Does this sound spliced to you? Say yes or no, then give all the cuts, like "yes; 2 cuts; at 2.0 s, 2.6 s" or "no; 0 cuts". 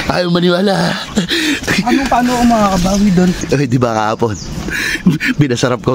yes; 2 cuts; at 1.6 s, 3.4 s